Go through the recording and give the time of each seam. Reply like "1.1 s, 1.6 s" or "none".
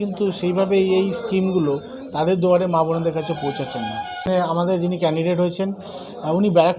4.4 s